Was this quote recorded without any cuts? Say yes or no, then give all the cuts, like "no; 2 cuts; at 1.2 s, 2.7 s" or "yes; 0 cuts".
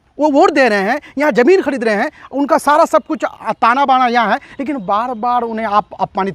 yes; 0 cuts